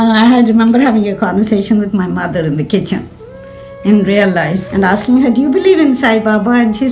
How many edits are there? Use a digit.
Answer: 1